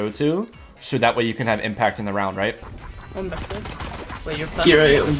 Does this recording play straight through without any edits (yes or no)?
no